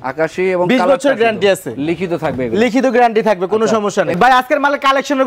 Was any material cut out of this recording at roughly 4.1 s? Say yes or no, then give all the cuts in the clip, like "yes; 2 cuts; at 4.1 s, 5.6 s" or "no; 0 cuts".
yes; 1 cut; at 4.1 s